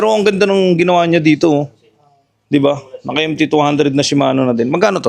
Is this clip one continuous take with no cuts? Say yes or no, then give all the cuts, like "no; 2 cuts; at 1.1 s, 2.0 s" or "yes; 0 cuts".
yes; 0 cuts